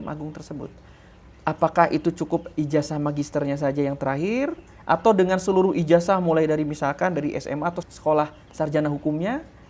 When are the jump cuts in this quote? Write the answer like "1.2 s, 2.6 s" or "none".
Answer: none